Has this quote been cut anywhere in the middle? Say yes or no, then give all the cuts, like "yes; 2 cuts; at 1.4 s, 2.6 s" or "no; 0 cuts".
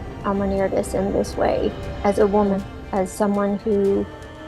yes; 1 cut; at 2.6 s